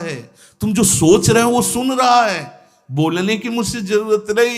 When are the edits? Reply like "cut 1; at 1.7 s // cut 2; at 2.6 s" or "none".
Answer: none